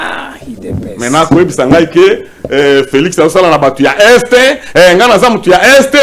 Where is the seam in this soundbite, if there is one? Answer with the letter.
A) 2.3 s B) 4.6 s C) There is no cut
C